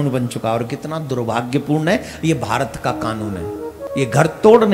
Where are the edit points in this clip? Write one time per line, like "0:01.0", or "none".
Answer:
0:03.8